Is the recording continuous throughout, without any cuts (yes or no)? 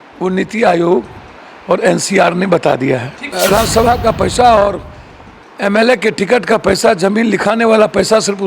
no